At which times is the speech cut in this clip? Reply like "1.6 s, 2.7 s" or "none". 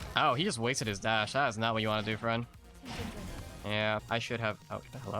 4.0 s